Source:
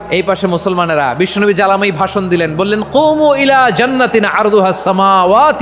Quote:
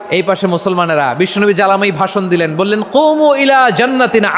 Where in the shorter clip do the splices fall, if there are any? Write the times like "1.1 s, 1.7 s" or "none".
none

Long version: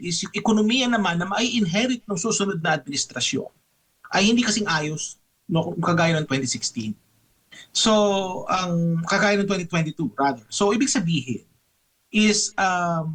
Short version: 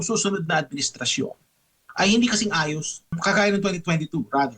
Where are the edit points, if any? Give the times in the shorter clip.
3.2 s

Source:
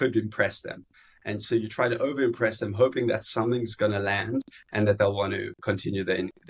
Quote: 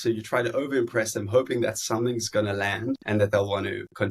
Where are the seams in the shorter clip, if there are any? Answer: 3.0 s

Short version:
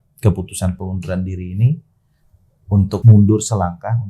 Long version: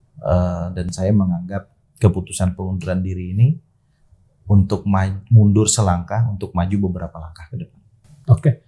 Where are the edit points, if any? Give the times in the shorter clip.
3.0 s

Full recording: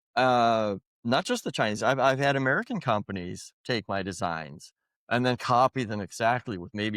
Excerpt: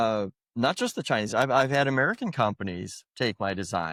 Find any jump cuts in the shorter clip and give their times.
none

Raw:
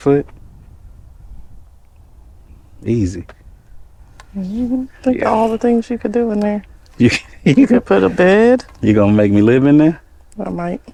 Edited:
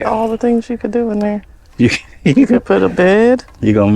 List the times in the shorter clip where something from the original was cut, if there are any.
none

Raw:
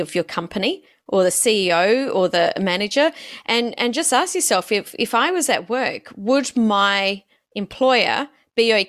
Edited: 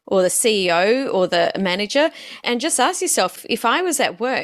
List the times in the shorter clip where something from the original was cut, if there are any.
2.4 s, 3.3 s

